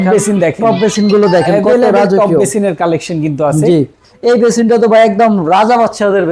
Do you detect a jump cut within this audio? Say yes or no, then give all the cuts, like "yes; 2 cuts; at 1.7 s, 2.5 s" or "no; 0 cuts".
yes; 1 cut; at 4.0 s